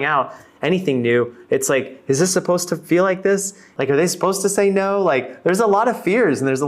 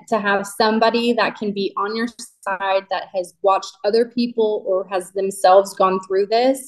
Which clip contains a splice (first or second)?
first